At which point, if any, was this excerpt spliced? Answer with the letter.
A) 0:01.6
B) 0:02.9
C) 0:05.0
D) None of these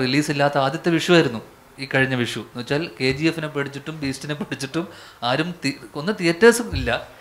D